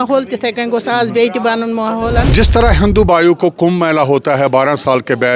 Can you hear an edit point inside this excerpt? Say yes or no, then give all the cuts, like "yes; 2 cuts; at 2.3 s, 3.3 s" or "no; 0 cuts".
yes; 1 cut; at 2.3 s